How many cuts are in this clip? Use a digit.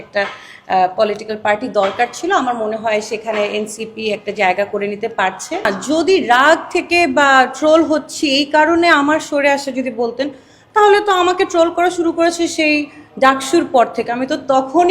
1